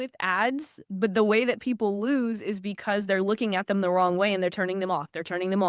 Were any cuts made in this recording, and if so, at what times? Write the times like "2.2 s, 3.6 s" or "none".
none